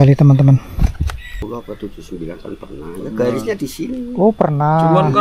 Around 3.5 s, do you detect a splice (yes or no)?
no